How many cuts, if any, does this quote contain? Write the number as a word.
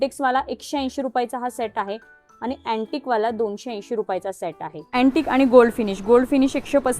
one